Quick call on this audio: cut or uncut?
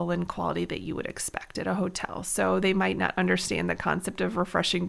uncut